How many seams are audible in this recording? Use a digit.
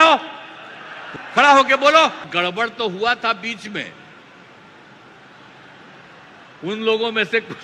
2